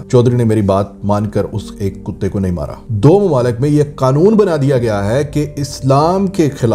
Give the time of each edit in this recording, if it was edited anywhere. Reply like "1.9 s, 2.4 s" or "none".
2.8 s